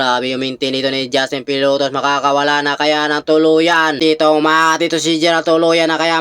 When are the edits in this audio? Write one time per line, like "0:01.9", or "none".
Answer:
0:04.0